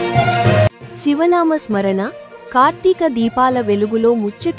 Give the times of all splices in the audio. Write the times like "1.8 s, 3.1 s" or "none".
none